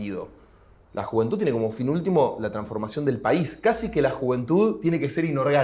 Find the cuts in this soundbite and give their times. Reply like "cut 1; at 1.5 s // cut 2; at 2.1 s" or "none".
none